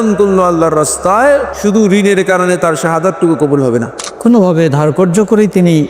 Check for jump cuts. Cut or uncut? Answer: cut